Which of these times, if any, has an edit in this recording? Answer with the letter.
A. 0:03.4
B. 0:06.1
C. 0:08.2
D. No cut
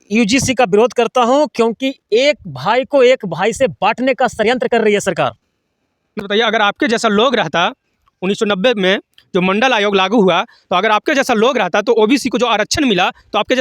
B